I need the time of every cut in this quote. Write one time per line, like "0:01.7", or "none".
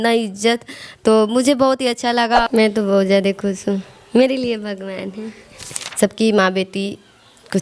0:02.5
0:05.8